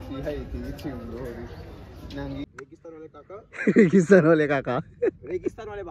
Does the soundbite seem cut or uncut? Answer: cut